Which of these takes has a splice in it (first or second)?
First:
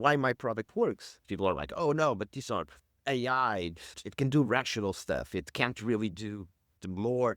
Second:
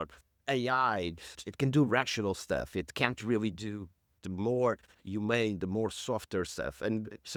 first